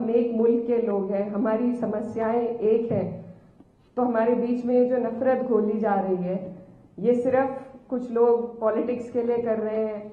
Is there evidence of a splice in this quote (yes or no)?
no